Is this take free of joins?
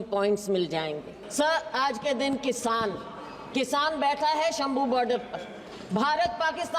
no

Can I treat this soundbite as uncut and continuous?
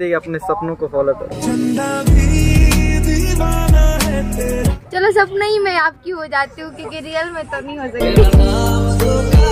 no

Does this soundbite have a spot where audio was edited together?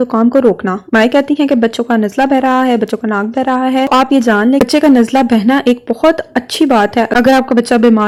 no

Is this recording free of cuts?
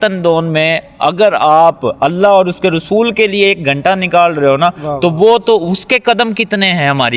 yes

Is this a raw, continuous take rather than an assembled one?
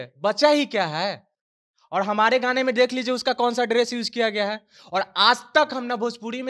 yes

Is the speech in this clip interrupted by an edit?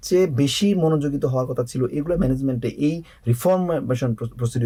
no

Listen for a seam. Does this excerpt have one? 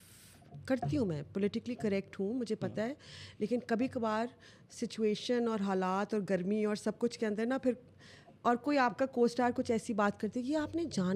no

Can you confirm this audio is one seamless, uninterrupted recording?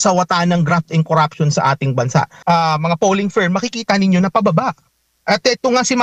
no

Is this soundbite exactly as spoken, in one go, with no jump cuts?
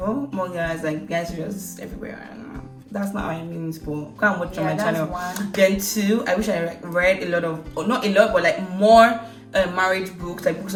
yes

